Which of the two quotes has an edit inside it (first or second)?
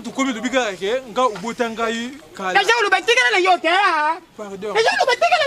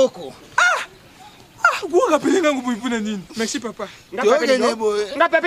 second